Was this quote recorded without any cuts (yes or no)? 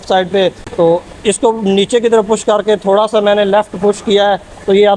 yes